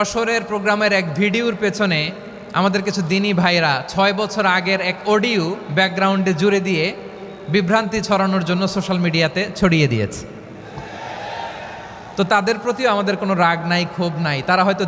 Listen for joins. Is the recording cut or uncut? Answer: uncut